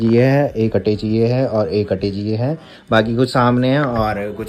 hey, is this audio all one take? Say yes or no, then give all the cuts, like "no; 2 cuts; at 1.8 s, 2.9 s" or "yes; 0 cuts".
yes; 0 cuts